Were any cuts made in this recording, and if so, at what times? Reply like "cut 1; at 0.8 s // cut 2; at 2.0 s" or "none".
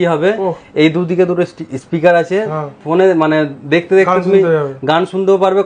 none